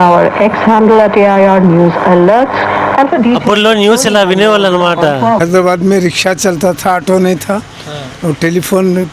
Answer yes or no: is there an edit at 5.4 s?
yes